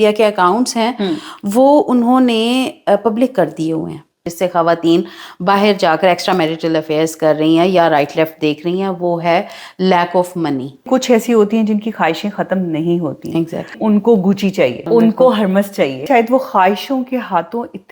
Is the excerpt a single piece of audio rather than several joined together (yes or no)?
no